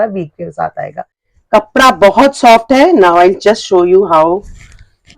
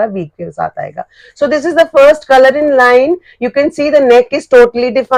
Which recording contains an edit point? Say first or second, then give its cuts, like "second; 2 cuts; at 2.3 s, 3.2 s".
first; 1 cut; at 1.2 s